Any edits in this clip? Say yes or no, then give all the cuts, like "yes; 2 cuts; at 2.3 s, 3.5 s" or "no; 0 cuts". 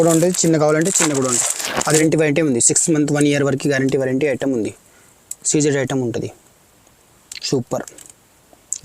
yes; 1 cut; at 2.0 s